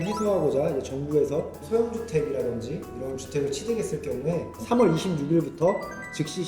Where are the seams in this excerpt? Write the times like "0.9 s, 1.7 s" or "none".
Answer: 4.5 s